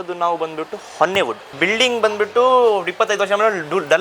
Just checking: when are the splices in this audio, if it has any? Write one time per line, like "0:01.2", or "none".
0:01.5